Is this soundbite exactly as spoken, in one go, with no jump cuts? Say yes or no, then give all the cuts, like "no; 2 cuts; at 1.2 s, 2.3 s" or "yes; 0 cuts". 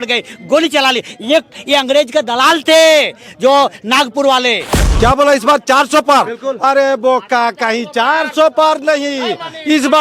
no; 1 cut; at 4.8 s